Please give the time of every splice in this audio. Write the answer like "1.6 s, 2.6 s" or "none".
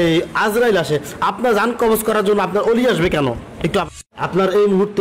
4.1 s